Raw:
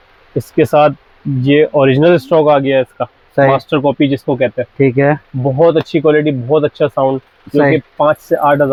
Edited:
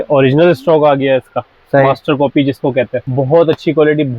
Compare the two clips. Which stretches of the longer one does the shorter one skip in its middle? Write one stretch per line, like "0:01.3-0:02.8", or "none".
0:04.7-0:05.3